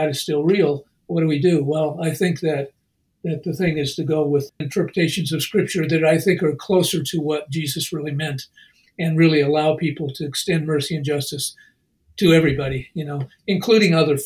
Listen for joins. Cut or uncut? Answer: cut